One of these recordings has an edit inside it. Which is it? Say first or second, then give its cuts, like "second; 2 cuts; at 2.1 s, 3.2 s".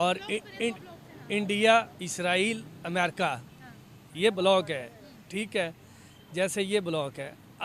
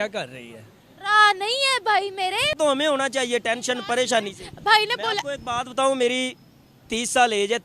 second; 1 cut; at 2.5 s